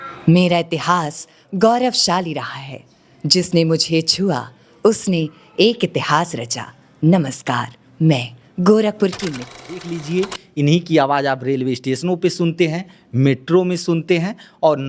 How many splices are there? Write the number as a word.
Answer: one